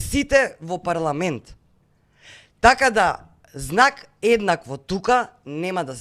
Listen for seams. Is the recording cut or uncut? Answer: uncut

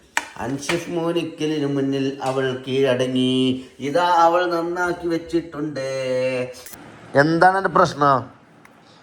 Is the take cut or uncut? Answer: cut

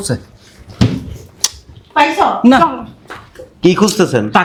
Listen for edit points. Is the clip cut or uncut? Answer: uncut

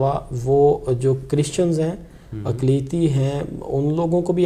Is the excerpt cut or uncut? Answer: uncut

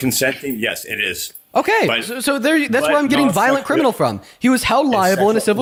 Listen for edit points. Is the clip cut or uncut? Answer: uncut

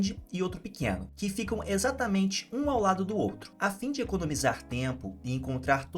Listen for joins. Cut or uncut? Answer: cut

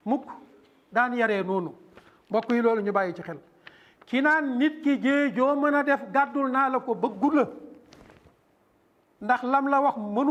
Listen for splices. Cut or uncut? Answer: uncut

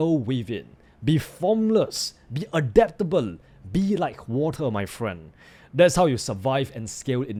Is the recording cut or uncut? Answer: uncut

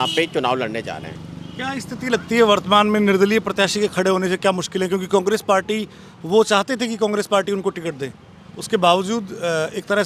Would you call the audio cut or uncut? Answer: uncut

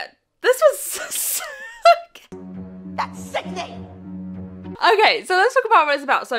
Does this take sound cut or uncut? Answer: uncut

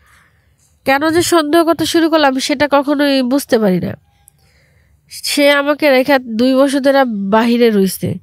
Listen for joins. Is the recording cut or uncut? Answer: uncut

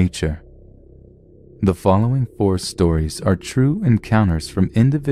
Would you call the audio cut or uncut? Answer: uncut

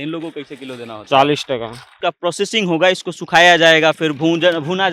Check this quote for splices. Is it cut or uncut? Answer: cut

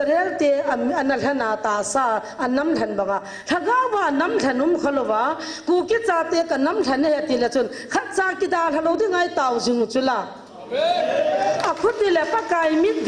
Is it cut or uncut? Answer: uncut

